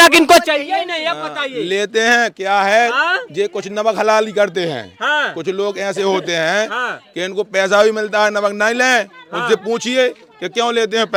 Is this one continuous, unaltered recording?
yes; 0 cuts

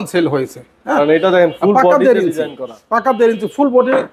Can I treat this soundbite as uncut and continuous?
yes; 0 cuts

